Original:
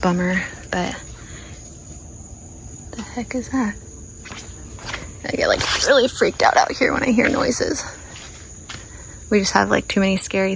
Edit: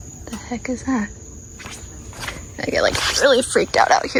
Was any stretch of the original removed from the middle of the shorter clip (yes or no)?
no